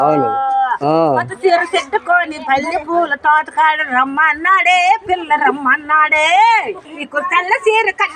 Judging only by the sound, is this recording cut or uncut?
cut